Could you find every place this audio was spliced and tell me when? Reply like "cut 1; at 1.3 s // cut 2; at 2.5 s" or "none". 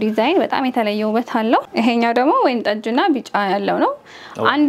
cut 1; at 1.7 s

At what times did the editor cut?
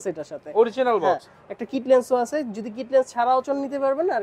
none

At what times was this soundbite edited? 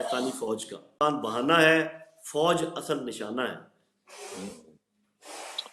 cut 1; at 1.0 s

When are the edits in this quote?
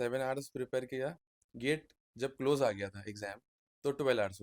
none

